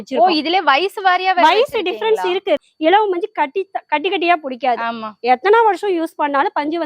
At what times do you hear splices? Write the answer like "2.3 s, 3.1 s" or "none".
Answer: 2.6 s